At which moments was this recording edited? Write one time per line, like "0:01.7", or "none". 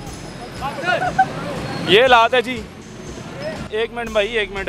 0:03.6